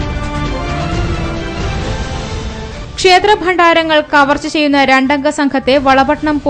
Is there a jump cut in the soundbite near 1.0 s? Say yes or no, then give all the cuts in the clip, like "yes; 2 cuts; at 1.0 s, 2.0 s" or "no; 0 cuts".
no; 1 cut; at 2.8 s